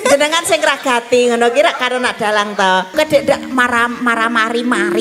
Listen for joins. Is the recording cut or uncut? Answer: cut